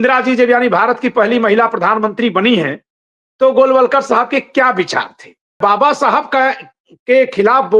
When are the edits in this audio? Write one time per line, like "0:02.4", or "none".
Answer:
0:05.6